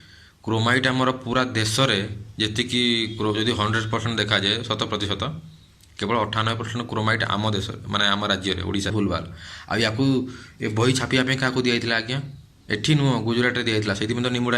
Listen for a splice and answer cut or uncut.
cut